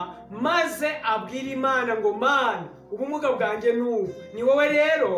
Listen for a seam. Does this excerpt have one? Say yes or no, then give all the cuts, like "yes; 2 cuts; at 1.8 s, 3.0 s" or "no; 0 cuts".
no; 0 cuts